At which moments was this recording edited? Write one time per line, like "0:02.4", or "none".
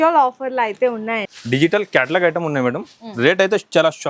0:01.2